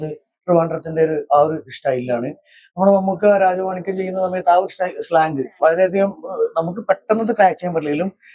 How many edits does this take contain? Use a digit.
0